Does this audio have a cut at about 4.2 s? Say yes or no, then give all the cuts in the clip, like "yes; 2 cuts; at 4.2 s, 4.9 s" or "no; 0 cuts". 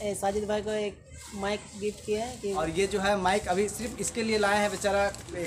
no; 1 cut; at 2.6 s